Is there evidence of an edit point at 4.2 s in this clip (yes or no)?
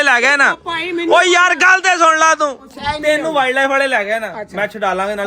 no